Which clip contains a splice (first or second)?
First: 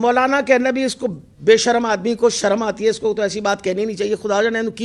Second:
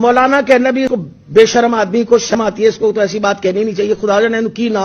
second